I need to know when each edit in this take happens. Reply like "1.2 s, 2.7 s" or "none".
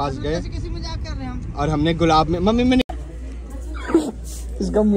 2.8 s